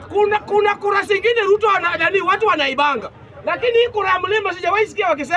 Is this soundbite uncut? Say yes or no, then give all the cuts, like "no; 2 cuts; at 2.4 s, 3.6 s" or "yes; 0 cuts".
yes; 0 cuts